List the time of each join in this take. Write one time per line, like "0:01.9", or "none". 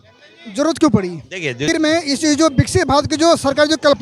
0:01.6